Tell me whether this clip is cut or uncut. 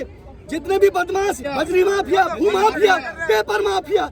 cut